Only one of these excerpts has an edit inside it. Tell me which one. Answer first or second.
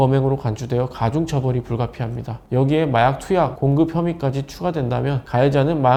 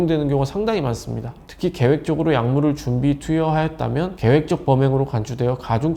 second